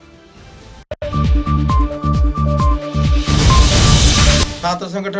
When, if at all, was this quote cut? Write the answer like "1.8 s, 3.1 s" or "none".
0.9 s, 4.4 s